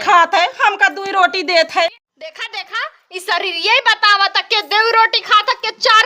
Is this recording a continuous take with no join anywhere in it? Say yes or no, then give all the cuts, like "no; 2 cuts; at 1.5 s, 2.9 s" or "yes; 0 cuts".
no; 1 cut; at 2.0 s